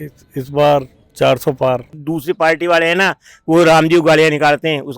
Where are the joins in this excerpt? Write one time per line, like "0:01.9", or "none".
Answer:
0:01.9

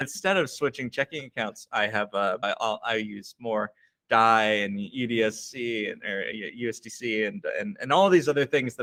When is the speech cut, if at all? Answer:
none

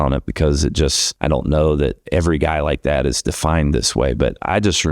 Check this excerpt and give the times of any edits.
0:01.1
0:02.0

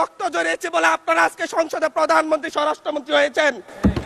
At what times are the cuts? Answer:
none

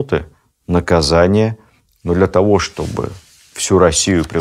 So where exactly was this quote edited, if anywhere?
0:01.6

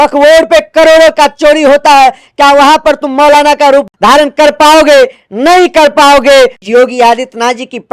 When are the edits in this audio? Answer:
0:03.9
0:06.6

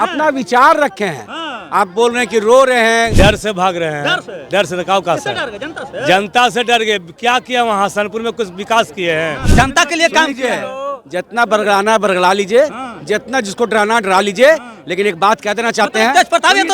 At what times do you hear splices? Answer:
0:03.1
0:09.4

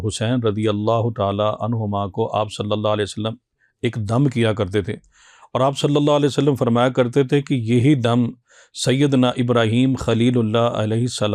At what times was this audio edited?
none

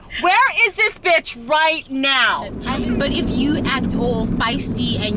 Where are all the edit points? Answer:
0:02.6

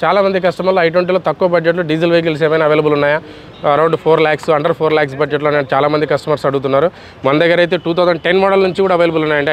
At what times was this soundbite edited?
none

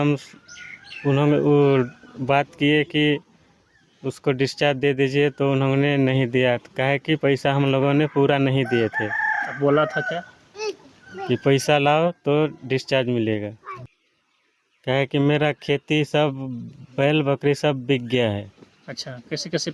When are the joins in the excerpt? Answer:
0:13.9

